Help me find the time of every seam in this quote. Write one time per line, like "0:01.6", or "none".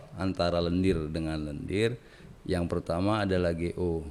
none